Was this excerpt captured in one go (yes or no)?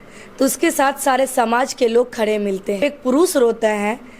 no